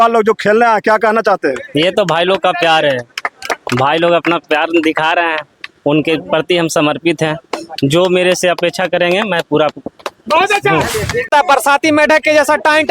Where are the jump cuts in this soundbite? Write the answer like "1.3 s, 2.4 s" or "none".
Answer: 11.3 s

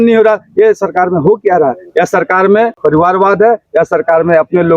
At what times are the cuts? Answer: 2.8 s

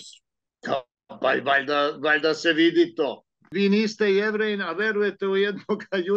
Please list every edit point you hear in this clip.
3.4 s

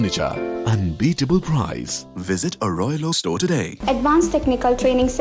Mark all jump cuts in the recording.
3.7 s

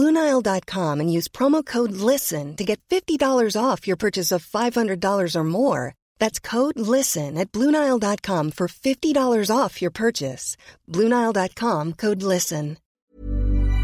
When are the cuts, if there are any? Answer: 12.9 s

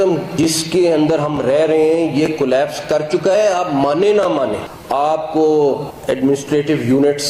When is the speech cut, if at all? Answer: none

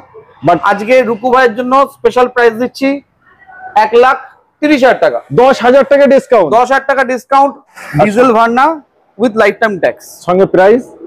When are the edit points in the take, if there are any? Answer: 7.7 s

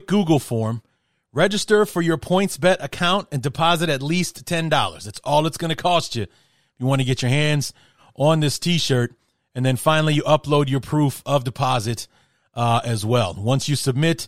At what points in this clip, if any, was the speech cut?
none

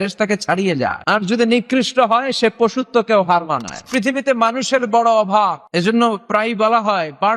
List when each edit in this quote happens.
1.0 s, 3.9 s, 5.6 s

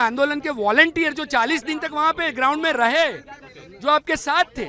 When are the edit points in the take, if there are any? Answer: none

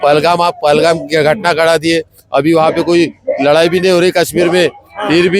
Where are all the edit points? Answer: none

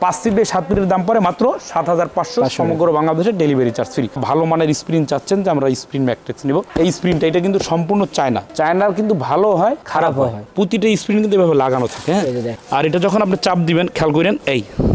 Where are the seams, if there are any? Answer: 4.1 s, 10.4 s, 12.5 s

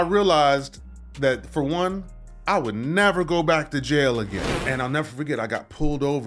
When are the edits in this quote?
4.5 s

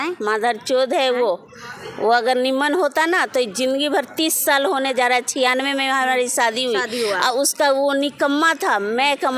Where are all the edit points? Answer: none

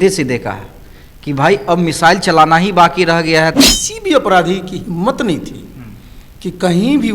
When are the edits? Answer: 3.6 s

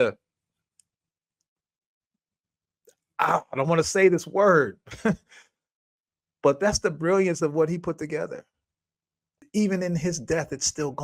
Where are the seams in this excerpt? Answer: 9.4 s

